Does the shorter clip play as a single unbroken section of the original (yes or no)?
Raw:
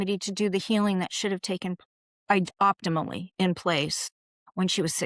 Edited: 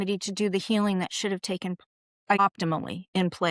no